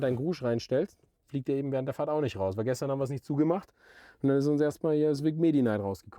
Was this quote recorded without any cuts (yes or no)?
yes